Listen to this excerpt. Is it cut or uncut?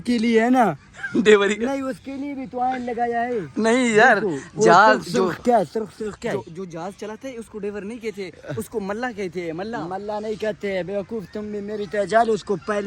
uncut